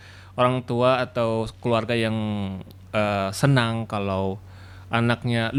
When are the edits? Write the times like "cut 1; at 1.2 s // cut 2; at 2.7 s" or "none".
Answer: none

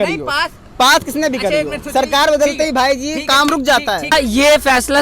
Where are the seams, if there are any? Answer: cut 1; at 4.1 s

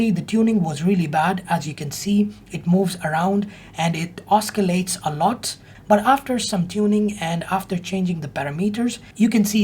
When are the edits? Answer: cut 1; at 5.7 s

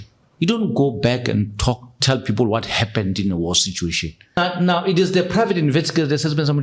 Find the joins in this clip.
cut 1; at 4.4 s

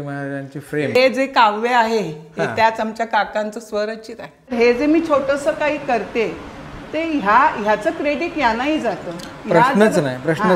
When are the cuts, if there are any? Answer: cut 1; at 1.0 s // cut 2; at 4.5 s

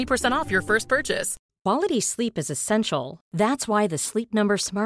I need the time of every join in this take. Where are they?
cut 1; at 1.3 s

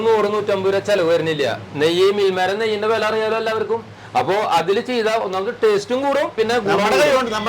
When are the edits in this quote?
none

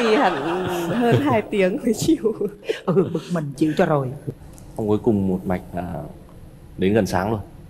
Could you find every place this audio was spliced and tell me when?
none

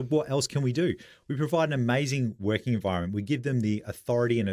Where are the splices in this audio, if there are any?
none

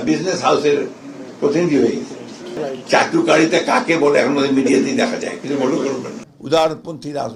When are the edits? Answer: cut 1; at 2.5 s // cut 2; at 6.2 s

